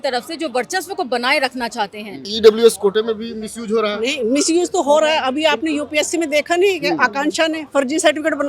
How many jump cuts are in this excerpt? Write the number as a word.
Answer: one